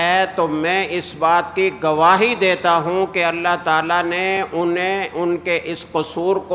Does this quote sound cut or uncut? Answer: uncut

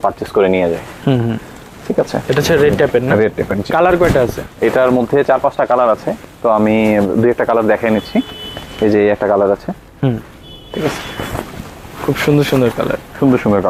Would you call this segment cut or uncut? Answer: uncut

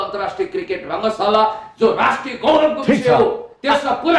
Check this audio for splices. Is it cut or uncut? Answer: uncut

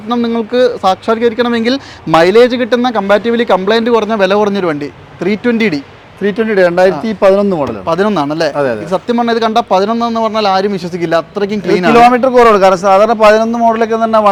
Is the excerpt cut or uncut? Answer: uncut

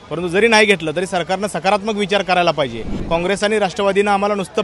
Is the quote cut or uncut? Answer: cut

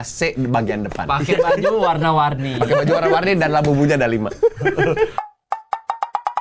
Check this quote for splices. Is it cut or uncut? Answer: uncut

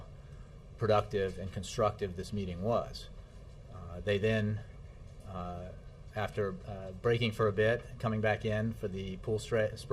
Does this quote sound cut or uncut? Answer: cut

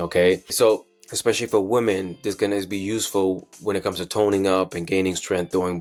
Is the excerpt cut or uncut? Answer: uncut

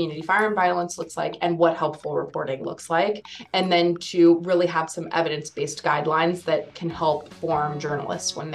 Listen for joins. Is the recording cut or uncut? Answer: cut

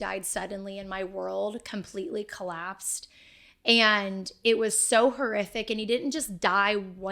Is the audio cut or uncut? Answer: uncut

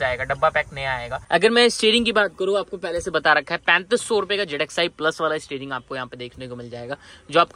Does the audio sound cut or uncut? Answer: uncut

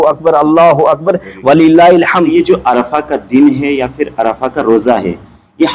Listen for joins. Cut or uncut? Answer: cut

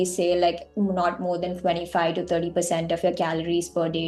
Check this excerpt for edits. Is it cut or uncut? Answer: uncut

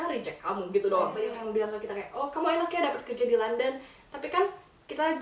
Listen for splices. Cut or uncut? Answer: cut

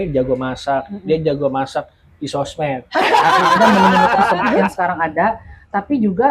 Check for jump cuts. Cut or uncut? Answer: cut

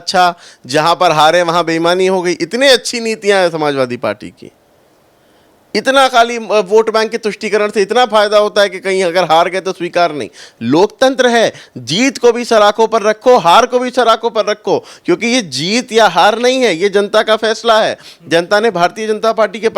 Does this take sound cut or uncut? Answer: uncut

